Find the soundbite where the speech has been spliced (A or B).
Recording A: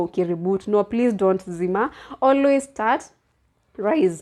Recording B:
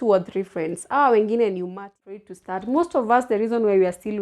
B